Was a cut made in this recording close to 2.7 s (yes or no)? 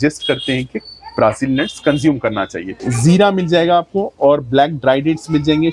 yes